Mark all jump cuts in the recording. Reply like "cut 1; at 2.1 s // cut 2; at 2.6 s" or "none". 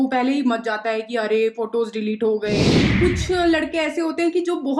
cut 1; at 2.8 s